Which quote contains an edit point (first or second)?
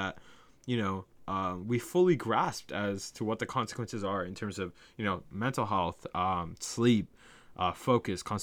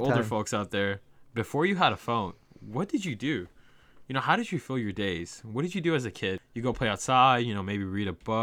second